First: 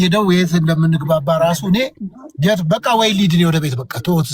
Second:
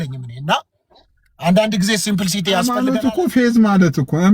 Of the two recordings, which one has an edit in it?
second; 1 cut; at 2.7 s

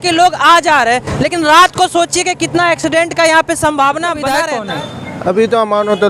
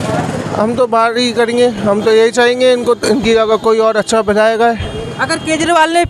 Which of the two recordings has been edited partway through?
first; 1 cut; at 4.5 s

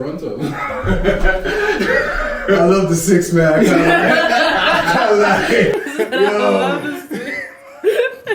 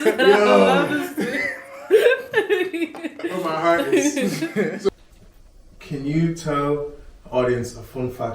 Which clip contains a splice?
second; 1 cut; at 4.9 s

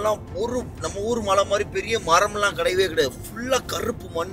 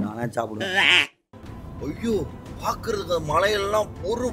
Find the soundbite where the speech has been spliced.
second; 2 cuts; at 1.4 s, 2.4 s

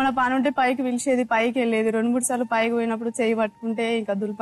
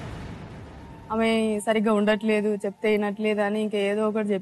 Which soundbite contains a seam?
second; 1 cut; at 1.0 s

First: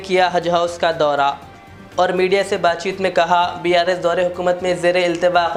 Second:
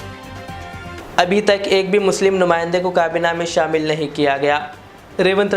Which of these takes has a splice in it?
second; 1 cut; at 1.0 s

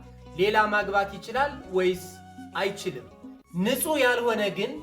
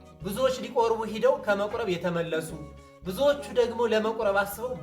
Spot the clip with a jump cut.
first; 1 cut; at 3.3 s

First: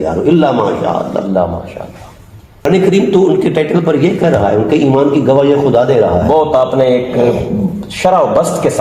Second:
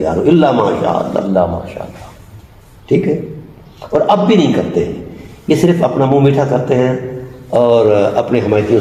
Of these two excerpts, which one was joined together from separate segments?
first; 1 cut; at 2.6 s

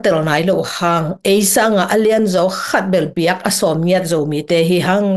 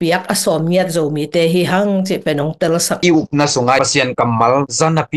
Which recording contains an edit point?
second; 2 cuts; at 3.0 s, 3.8 s

